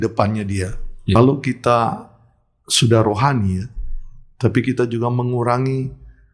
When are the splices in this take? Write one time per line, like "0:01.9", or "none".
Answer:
0:01.2